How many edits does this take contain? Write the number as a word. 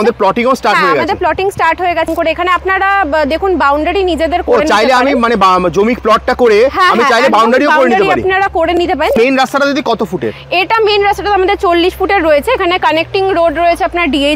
two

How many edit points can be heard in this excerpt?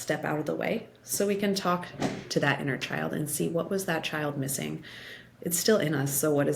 zero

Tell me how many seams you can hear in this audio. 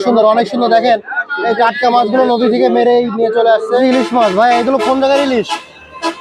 one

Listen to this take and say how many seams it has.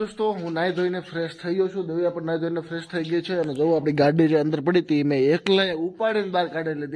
zero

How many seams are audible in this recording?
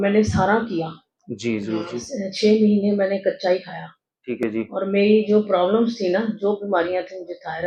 zero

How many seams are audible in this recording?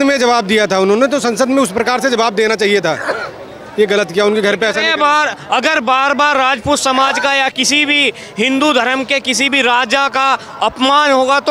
zero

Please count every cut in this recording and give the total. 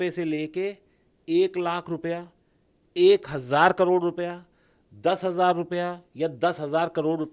zero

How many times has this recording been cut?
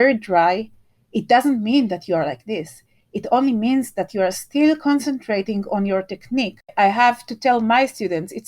one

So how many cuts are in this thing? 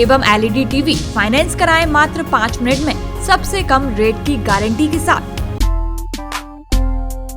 one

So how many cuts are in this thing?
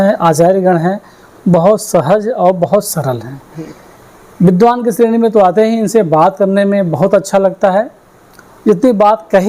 zero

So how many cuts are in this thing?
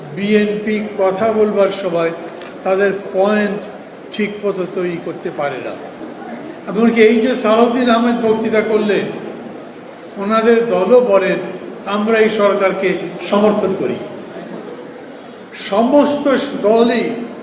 one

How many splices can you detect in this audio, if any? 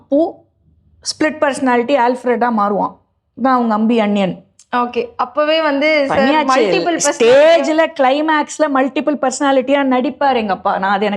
zero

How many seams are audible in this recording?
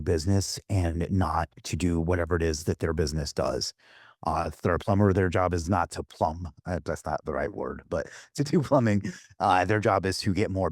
zero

